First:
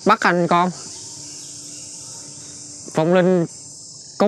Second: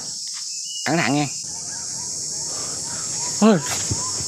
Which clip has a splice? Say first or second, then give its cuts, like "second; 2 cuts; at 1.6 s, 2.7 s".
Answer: second; 1 cut; at 1.4 s